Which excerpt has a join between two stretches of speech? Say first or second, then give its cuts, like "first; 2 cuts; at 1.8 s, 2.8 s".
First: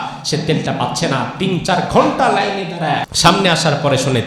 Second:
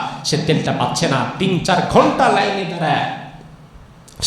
first; 1 cut; at 3.1 s